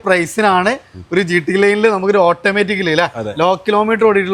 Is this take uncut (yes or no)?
yes